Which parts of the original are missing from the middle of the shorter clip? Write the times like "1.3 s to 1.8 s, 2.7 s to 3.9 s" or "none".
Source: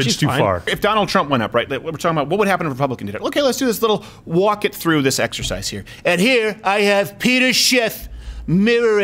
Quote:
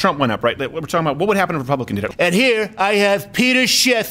3.2 s to 5.9 s